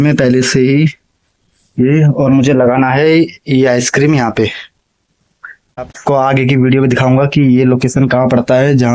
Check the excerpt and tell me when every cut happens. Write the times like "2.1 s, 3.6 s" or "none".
none